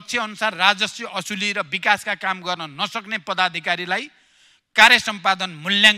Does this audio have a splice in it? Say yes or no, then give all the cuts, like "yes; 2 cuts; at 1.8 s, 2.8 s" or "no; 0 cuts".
no; 0 cuts